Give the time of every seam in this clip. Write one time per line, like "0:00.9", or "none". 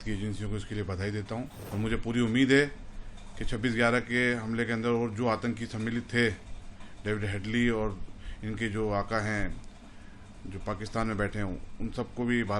0:01.6